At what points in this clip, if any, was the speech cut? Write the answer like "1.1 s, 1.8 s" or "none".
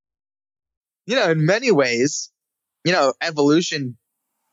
1.1 s